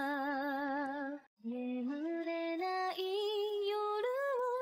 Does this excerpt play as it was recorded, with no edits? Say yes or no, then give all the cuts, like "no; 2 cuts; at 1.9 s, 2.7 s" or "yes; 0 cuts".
no; 1 cut; at 1.3 s